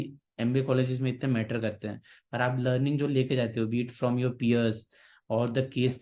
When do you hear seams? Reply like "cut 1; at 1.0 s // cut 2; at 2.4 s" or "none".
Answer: none